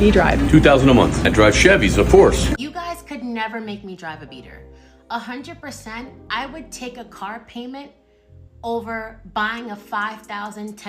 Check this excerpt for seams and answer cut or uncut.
cut